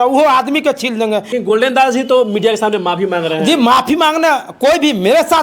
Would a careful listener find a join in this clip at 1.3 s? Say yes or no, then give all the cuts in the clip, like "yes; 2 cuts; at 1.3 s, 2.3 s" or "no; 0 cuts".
yes; 1 cut; at 1.3 s